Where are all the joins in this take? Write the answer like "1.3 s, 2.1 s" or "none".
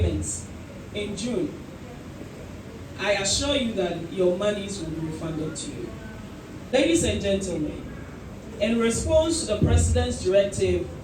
6.7 s